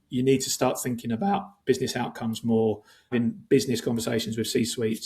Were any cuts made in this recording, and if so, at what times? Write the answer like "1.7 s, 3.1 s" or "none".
3.1 s